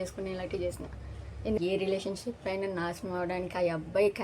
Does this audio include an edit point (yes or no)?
yes